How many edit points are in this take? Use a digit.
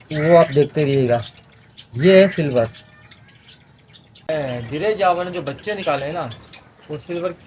1